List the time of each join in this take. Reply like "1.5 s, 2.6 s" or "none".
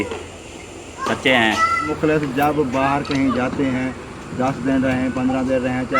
1.9 s